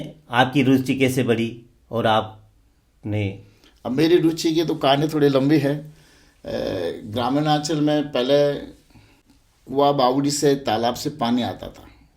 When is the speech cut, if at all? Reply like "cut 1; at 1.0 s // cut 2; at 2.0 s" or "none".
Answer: none